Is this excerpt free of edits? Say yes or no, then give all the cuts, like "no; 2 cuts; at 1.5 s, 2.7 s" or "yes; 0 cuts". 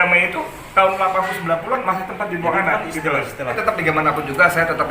no; 1 cut; at 3.6 s